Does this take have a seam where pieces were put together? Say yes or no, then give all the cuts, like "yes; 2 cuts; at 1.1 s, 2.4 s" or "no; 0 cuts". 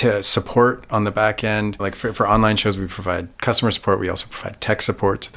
yes; 1 cut; at 1.9 s